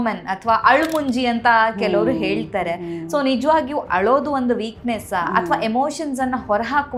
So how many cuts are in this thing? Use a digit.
0